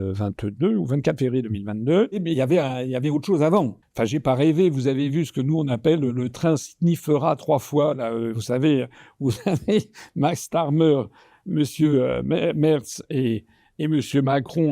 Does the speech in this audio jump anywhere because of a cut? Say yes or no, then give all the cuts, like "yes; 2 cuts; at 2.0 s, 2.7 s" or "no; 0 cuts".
yes; 2 cuts; at 2.2 s, 3.8 s